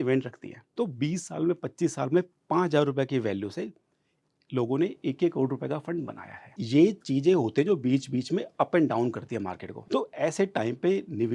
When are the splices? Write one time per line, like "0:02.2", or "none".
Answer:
0:06.6